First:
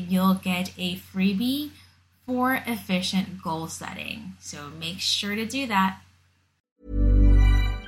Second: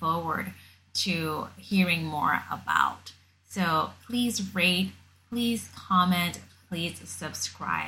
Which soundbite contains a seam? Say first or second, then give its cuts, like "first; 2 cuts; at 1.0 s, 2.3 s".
first; 1 cut; at 6.6 s